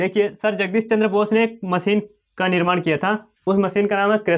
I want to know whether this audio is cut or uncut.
uncut